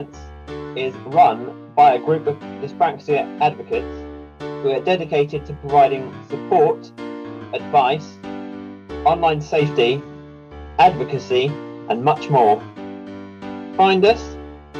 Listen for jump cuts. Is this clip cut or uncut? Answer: uncut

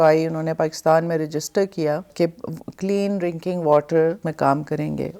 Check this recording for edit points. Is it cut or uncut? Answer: cut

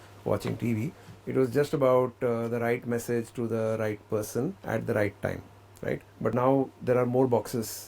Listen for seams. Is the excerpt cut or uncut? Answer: cut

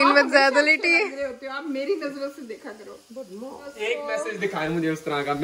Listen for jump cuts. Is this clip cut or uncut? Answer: cut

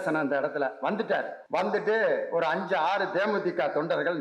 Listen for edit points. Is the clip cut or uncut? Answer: cut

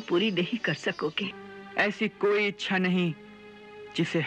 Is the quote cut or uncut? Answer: cut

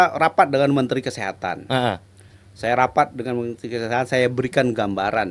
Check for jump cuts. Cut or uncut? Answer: uncut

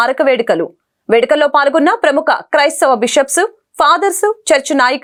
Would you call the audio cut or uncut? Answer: uncut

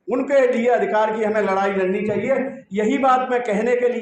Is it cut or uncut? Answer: uncut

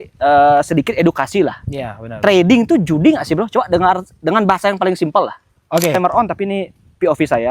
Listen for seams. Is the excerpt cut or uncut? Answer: cut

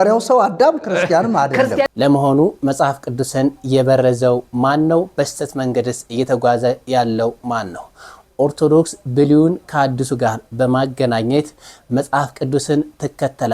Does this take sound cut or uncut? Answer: cut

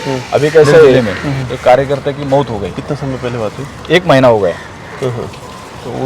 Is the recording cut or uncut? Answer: cut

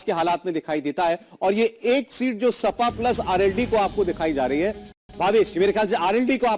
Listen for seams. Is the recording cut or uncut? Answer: uncut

